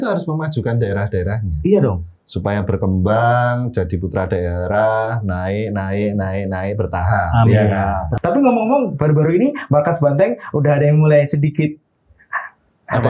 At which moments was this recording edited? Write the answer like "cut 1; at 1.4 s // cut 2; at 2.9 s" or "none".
cut 1; at 8.1 s